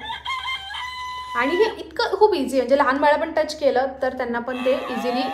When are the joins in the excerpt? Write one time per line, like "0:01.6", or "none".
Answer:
none